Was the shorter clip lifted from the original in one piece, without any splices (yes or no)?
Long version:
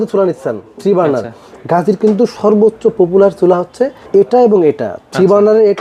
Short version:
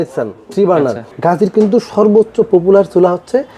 no